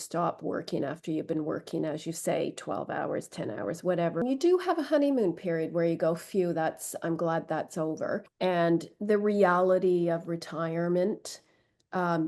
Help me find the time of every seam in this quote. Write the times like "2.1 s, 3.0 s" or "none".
4.2 s, 8.3 s